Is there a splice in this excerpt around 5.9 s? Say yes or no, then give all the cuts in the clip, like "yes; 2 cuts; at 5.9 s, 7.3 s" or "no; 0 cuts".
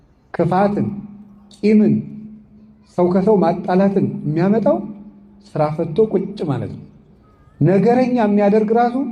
no; 0 cuts